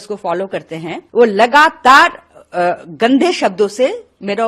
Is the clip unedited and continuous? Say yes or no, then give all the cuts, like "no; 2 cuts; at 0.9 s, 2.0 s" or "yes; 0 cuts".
no; 1 cut; at 1.0 s